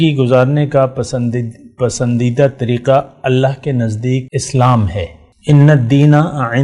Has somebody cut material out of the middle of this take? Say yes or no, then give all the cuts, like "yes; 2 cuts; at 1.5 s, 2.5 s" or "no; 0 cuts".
yes; 2 cuts; at 4.3 s, 5.2 s